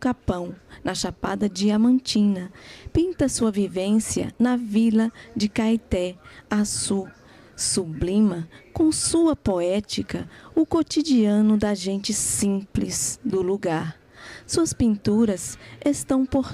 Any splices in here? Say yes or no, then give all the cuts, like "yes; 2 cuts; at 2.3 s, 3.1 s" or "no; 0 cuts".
yes; 1 cut; at 11.5 s